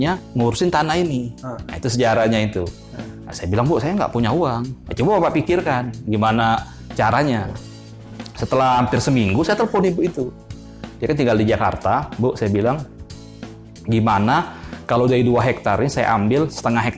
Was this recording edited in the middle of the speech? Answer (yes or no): no